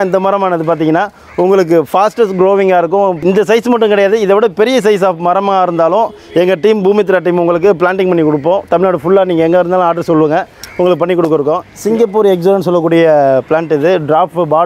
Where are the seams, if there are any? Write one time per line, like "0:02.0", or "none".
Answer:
0:11.7